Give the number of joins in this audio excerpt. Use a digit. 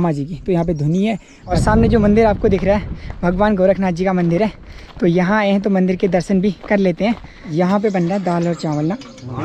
2